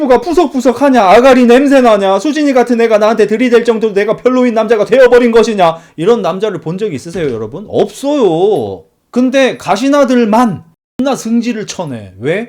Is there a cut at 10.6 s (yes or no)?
yes